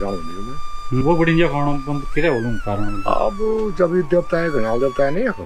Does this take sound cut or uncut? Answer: cut